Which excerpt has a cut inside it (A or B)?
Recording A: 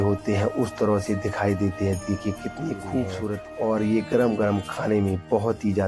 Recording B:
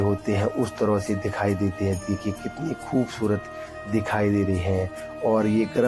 A